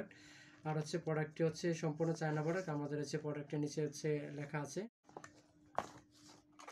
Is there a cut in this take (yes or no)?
yes